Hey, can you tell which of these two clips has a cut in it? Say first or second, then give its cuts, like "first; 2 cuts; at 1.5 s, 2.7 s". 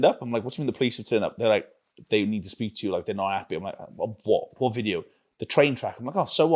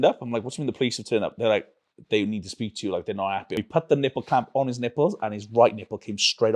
second; 1 cut; at 3.6 s